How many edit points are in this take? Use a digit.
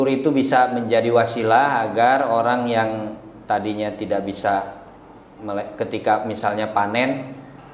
0